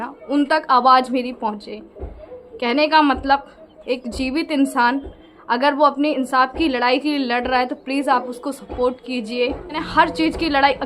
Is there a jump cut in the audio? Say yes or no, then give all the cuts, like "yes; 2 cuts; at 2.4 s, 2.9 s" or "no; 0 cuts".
yes; 1 cut; at 9.9 s